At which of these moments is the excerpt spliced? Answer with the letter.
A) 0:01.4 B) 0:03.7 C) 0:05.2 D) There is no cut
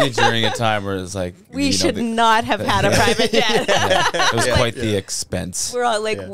D